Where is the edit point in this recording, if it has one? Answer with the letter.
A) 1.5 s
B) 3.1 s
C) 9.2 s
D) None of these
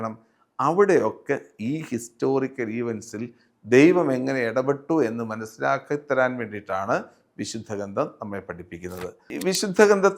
C